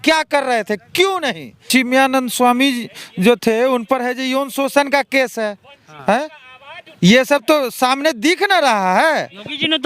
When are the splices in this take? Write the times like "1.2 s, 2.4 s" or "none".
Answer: 1.7 s